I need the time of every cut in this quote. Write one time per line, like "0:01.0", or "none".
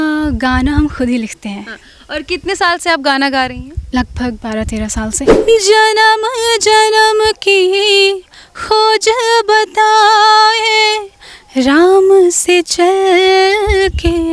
0:05.3

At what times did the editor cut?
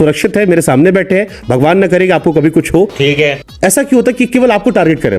0:03.0

